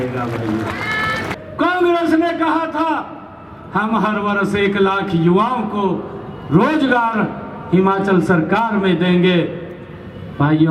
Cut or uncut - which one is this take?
uncut